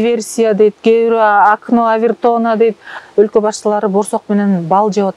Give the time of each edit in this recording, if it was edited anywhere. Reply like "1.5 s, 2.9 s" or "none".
3.0 s